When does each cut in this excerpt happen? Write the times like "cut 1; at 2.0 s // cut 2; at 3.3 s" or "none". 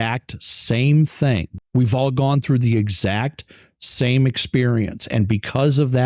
cut 1; at 1.6 s